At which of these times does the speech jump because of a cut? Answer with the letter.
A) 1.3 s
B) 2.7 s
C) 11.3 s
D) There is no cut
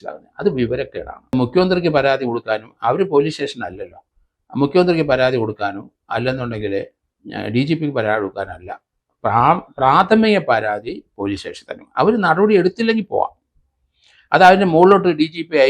A